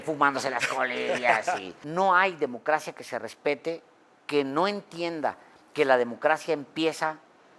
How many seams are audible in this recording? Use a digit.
1